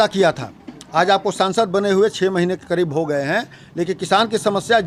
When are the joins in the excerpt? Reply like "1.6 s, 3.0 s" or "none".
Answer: none